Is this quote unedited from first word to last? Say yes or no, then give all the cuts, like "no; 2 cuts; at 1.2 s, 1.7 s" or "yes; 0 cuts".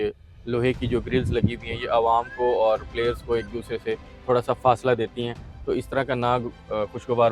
yes; 0 cuts